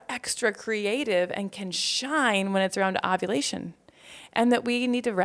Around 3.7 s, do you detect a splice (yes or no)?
no